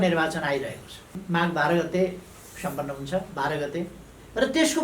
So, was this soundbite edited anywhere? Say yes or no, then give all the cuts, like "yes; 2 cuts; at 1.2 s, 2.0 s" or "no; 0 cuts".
yes; 2 cuts; at 1.2 s, 3.3 s